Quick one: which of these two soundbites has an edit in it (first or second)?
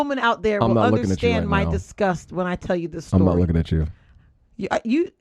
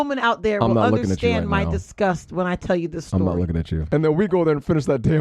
second